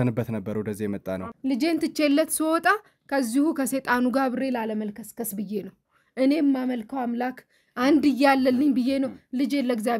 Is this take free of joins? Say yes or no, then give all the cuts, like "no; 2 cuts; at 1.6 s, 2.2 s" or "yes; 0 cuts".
no; 1 cut; at 1.3 s